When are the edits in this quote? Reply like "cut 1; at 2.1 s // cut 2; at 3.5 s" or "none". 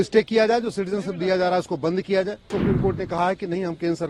cut 1; at 2.5 s